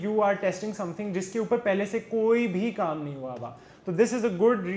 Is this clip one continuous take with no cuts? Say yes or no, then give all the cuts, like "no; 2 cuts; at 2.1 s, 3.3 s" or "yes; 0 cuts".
yes; 0 cuts